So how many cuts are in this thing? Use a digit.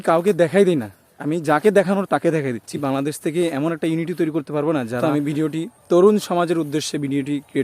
2